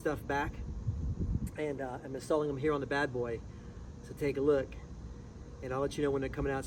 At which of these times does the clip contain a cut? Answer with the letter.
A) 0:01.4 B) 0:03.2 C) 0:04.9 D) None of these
D